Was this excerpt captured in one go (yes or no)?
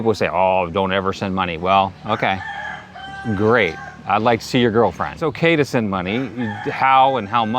no